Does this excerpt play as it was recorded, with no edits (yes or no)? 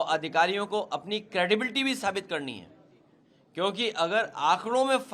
yes